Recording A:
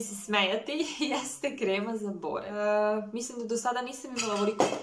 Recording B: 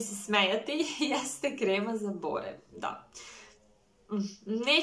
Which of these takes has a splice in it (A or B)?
A